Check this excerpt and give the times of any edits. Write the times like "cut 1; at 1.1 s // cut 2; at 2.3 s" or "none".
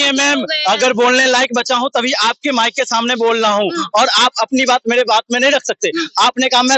none